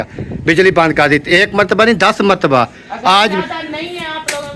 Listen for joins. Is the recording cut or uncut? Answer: uncut